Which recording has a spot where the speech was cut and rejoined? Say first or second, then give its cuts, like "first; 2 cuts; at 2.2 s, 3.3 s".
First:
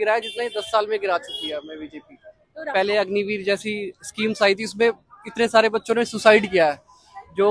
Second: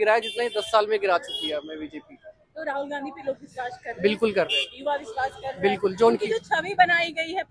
first; 1 cut; at 2.7 s